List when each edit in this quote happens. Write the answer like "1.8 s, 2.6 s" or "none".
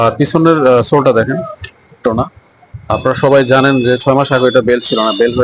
2.1 s